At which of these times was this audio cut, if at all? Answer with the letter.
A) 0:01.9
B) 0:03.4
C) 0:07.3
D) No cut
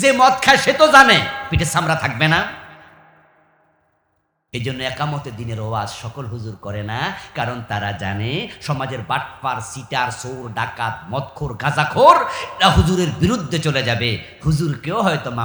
D